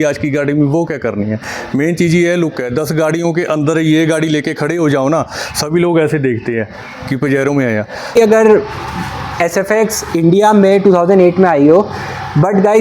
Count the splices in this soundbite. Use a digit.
1